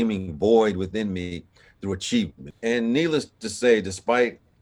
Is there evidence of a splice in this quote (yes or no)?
yes